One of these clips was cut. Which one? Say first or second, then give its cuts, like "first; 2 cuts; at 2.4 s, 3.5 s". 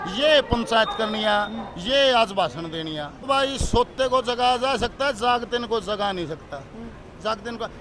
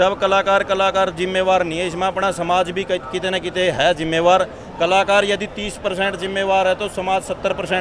first; 1 cut; at 3.3 s